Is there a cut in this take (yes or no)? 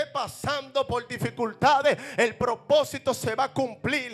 no